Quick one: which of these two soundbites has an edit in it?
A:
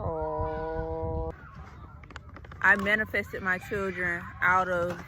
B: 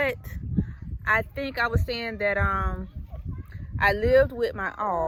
A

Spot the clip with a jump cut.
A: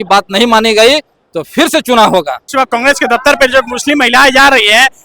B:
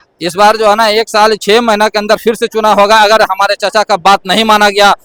A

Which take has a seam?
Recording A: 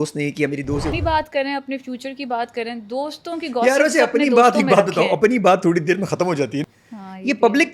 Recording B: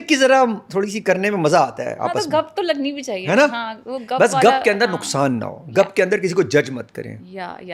A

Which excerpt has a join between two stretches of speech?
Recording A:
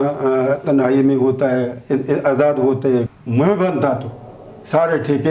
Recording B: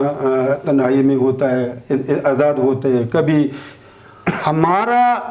A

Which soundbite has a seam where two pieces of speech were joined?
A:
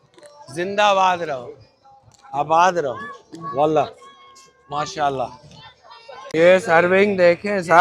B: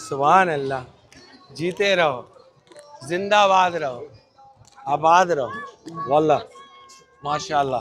A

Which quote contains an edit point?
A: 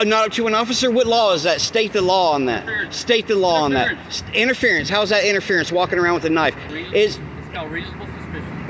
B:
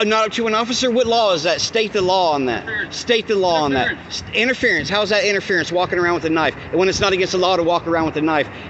A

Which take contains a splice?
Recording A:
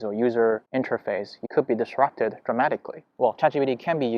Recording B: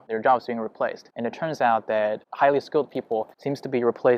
A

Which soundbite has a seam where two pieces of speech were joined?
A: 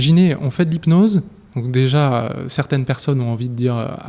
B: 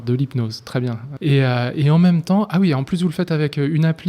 B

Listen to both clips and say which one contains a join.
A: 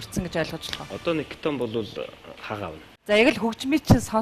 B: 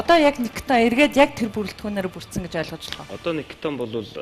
A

